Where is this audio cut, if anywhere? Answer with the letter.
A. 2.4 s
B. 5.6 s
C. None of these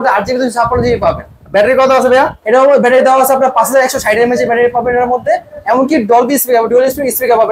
C